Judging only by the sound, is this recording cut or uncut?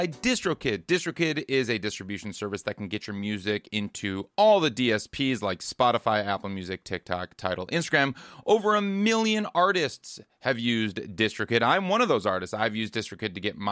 uncut